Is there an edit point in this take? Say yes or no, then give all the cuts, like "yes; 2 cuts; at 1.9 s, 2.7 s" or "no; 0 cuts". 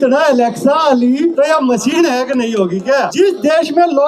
yes; 2 cuts; at 1.3 s, 3.1 s